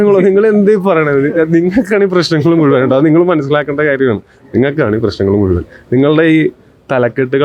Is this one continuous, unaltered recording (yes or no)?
yes